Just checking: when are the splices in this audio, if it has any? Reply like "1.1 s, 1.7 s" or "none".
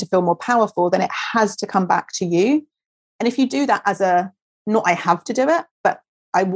none